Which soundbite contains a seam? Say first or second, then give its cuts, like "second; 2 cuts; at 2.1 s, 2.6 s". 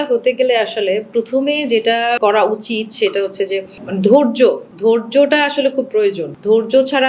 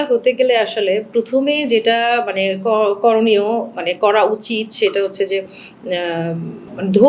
first; 2 cuts; at 2.2 s, 3.8 s